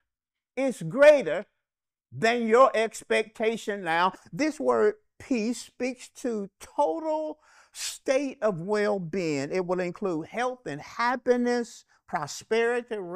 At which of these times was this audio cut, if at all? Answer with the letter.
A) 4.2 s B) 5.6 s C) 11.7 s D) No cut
A